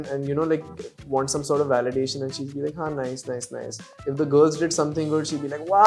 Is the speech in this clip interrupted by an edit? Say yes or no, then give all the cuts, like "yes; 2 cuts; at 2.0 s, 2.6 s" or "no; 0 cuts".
no; 0 cuts